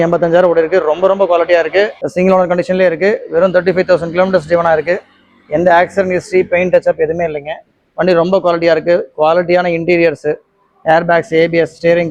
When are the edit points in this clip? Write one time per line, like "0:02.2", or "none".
0:02.0